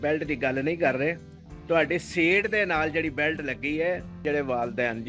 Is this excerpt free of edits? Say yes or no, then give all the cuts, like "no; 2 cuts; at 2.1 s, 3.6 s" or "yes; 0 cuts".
no; 1 cut; at 4.2 s